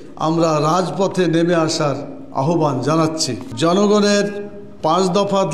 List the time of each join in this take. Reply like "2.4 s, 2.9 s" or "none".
3.4 s